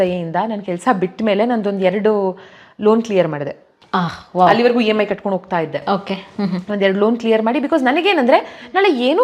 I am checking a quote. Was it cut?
no; 0 cuts

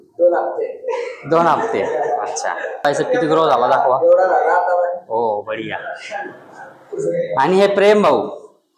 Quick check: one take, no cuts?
no; 1 cut; at 2.8 s

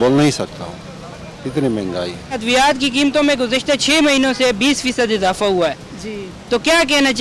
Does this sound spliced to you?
no; 0 cuts

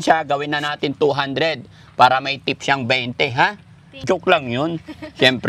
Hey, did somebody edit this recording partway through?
yes; 1 cut; at 4.0 s

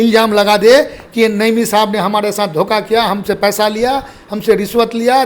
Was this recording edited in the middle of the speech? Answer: no; 0 cuts

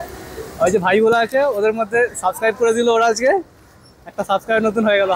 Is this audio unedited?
yes; 0 cuts

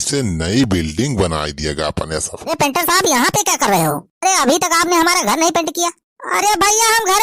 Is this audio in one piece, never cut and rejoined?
no; 1 cut; at 2.4 s

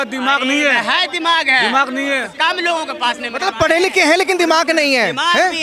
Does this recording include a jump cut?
no; 0 cuts

